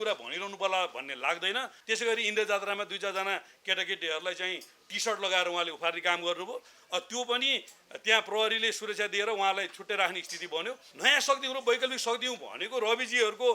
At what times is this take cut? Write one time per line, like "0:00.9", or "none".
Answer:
0:01.7
0:10.9